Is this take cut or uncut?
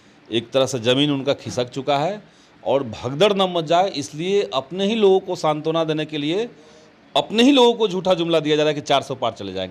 uncut